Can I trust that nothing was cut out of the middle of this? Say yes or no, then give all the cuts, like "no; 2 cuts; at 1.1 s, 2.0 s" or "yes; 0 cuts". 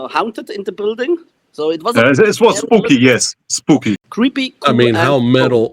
no; 1 cut; at 4.0 s